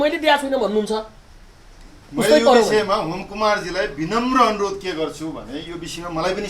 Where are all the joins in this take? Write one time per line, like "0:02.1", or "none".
none

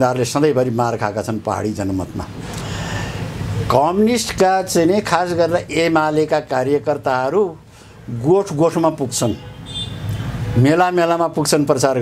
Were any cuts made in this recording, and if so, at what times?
none

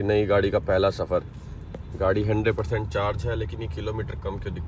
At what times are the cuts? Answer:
none

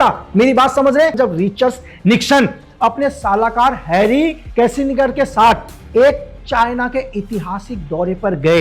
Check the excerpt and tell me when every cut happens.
0:01.1

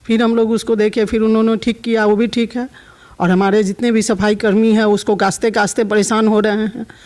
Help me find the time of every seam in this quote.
0:02.9

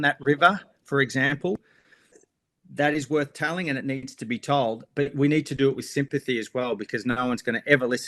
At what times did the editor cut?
none

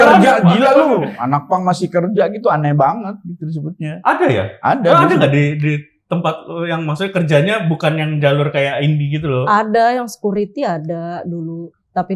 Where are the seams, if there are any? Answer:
none

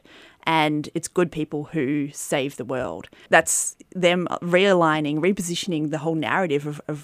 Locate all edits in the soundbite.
0:03.2

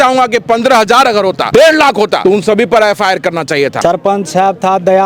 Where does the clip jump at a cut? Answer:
0:01.4
0:02.2
0:03.8

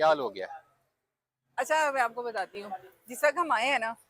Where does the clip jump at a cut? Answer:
none

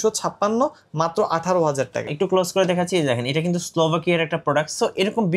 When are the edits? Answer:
0:02.1

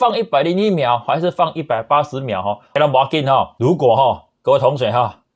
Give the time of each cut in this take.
0:02.7
0:03.5

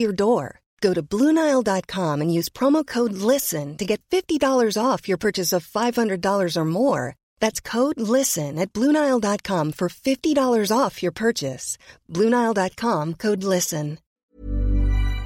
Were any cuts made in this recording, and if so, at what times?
0:14.1

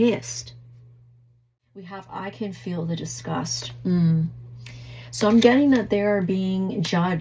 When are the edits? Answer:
0:01.5

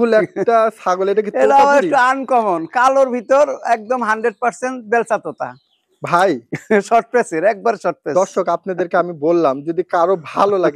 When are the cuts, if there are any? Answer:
none

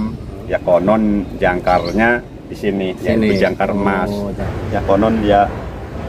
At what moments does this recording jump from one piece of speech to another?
0:04.4

